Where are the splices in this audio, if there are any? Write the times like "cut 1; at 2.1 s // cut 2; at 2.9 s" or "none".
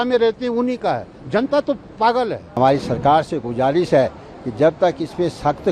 cut 1; at 2.6 s